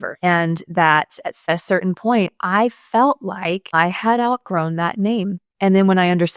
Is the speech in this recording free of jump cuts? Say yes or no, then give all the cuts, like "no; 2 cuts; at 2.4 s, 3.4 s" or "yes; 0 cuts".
no; 1 cut; at 5.4 s